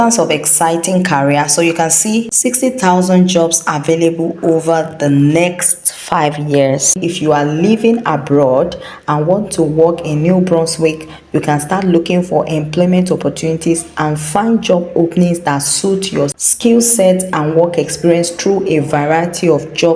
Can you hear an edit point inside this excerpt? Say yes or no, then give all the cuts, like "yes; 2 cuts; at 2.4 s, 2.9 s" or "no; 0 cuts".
yes; 3 cuts; at 2.3 s, 7.0 s, 16.4 s